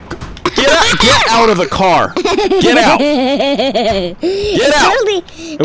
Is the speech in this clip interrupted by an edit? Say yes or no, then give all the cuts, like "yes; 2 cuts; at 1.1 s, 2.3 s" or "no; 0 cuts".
no; 0 cuts